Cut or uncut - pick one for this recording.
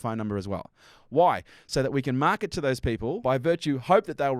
cut